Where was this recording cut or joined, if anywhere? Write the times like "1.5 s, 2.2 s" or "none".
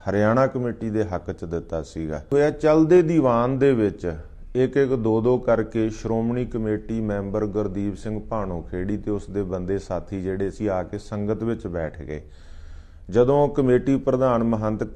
2.3 s

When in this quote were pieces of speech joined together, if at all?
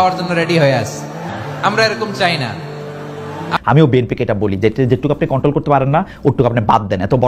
1.3 s, 3.5 s

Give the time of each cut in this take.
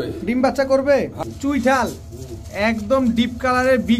1.2 s

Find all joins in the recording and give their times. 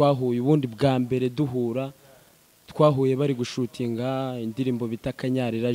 none

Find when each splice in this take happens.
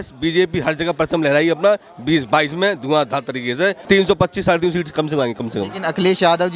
3.8 s

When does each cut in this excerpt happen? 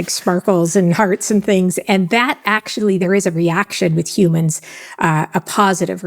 3.0 s

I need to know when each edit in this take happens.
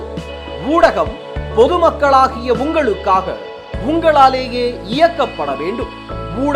none

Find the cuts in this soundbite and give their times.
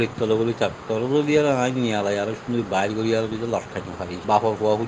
none

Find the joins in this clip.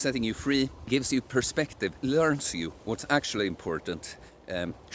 0.8 s, 2.0 s

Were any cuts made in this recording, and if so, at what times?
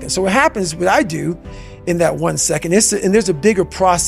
none

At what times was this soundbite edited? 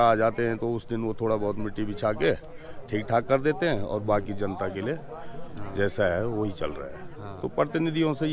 none

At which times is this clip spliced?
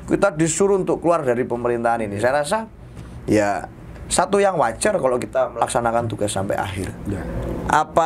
6.9 s

